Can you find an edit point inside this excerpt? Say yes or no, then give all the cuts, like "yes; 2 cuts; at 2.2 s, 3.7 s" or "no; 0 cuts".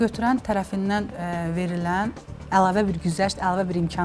no; 0 cuts